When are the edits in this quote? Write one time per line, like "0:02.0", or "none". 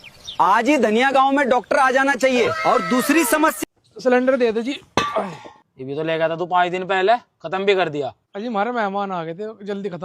0:03.6